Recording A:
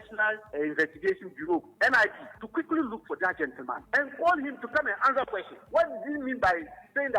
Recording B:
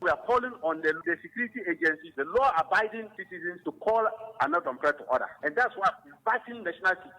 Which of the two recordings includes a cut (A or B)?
B